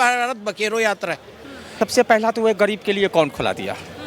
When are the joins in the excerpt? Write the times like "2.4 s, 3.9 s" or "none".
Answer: 1.8 s

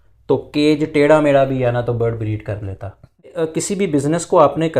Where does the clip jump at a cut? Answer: 3.4 s

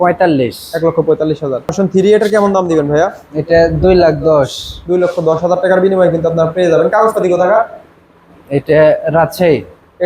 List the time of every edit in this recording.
1.7 s

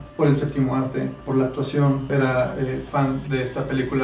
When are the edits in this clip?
1.2 s, 2.1 s

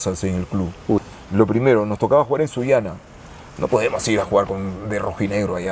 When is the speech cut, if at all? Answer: 1.2 s

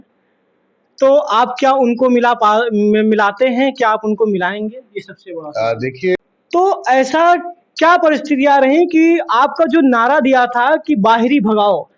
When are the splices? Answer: 6.2 s

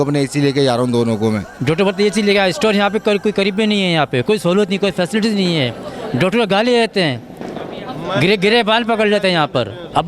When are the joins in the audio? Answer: none

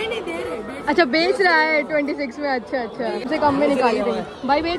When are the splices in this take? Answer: 3.3 s

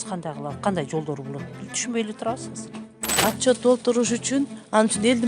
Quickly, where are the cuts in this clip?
3.1 s

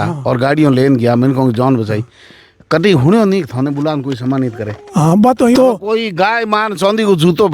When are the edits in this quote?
5.6 s

